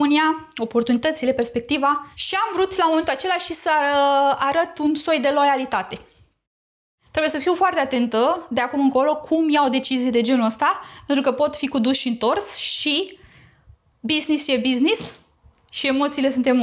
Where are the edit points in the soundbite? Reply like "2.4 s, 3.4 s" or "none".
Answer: 6.9 s